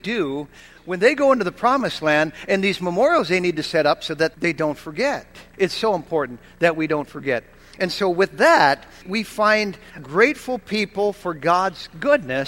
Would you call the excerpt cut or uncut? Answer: cut